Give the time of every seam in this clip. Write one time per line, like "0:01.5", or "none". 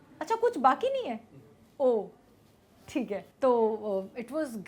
0:03.3